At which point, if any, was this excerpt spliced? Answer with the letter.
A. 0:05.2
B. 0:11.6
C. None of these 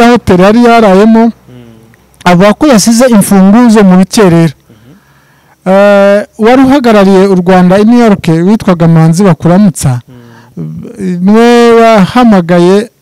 C